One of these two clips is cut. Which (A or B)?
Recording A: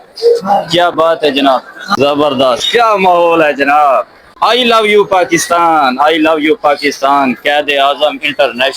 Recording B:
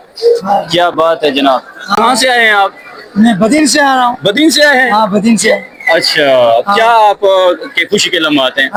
A